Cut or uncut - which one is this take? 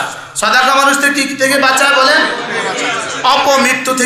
uncut